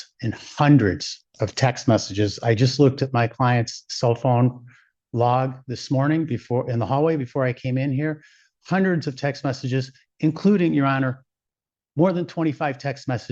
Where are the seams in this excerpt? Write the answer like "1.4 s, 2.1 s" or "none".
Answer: none